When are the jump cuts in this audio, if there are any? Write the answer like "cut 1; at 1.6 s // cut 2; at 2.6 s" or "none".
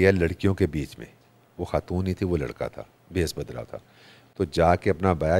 none